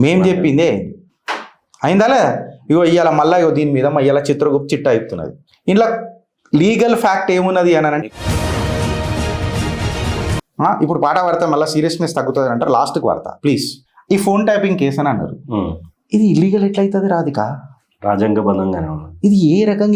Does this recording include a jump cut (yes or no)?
yes